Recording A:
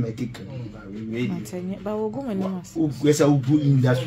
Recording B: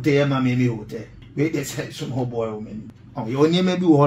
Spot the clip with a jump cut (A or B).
B